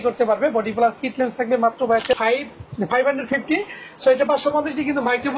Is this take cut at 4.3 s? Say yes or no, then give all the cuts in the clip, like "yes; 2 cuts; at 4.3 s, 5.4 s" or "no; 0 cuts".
no; 1 cut; at 2.1 s